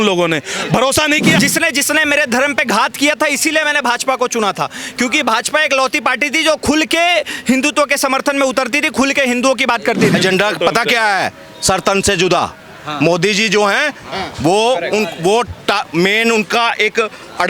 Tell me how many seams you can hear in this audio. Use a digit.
2